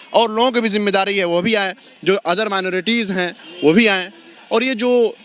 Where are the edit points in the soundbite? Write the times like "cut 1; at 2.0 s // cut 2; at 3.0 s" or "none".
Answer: none